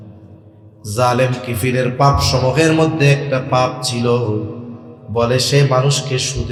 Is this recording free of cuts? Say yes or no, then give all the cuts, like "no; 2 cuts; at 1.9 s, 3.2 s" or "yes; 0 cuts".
yes; 0 cuts